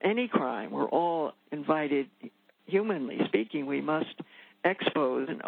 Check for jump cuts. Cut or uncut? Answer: cut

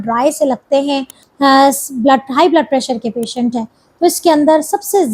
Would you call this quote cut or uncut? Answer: cut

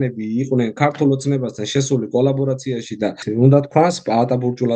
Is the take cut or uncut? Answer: cut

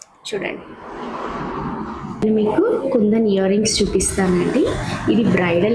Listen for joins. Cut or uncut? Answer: cut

